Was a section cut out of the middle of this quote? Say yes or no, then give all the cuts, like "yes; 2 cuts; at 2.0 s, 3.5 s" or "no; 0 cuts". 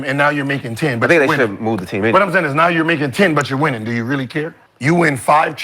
yes; 1 cut; at 4.6 s